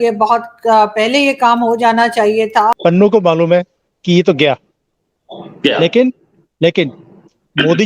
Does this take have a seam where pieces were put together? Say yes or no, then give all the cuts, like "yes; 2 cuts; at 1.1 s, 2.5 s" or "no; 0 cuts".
yes; 1 cut; at 2.7 s